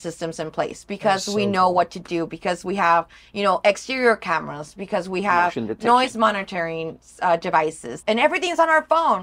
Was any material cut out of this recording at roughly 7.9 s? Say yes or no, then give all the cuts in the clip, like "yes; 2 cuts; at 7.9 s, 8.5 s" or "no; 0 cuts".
yes; 1 cut; at 7.9 s